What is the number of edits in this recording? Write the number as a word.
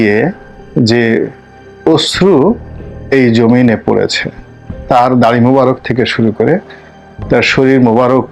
zero